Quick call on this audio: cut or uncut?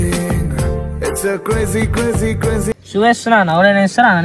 cut